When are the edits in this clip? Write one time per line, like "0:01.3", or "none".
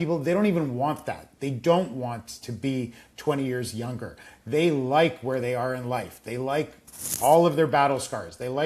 none